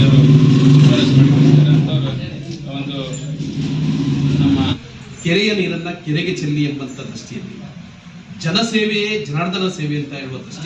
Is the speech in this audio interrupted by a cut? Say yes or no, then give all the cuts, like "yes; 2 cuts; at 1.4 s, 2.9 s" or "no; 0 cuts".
yes; 1 cut; at 4.8 s